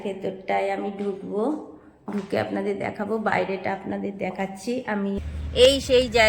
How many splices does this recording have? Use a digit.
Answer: 1